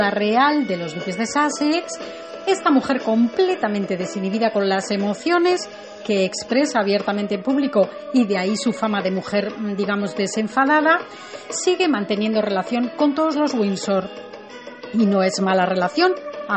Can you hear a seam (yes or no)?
yes